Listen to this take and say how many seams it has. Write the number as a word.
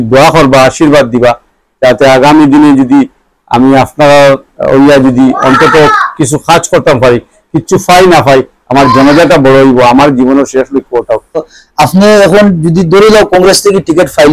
one